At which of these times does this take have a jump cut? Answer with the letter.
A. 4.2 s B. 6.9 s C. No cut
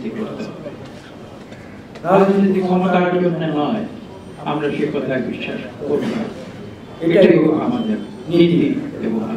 C